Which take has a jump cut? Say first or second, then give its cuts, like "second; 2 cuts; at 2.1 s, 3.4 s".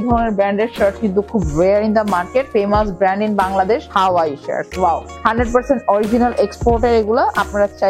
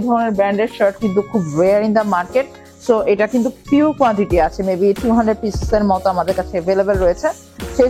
first; 3 cuts; at 2.5 s, 3.8 s, 5.1 s